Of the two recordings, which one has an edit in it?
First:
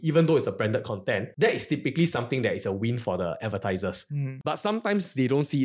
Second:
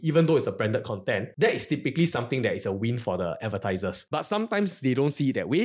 second; 1 cut; at 4.0 s

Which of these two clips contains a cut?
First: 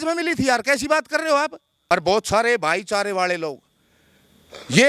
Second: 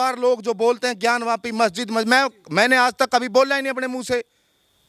first; 1 cut; at 1.7 s

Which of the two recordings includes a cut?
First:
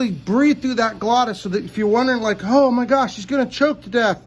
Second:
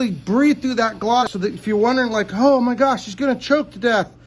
second; 1 cut; at 1.3 s

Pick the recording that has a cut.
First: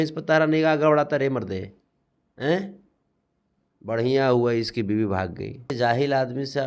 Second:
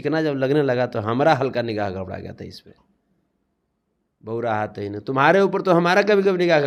first; 1 cut; at 5.7 s

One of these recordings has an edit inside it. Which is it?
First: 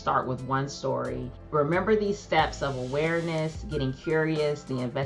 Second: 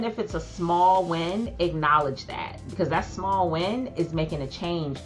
first; 1 cut; at 1.3 s

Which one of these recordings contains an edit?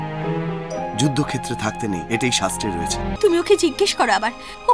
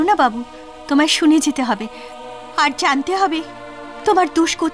first; 1 cut; at 3.1 s

